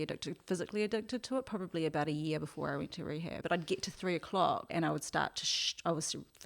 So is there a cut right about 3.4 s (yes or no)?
yes